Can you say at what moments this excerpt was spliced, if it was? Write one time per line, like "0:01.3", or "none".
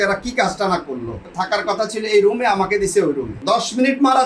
0:01.3
0:03.3